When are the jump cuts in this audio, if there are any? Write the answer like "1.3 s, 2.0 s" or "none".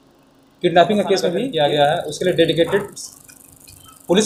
1.4 s

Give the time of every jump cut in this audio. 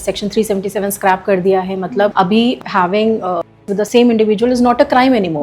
2.4 s, 3.8 s

